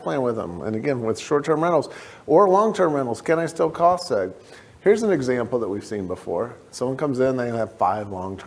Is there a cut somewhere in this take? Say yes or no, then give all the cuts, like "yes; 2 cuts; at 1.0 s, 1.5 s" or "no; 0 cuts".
no; 0 cuts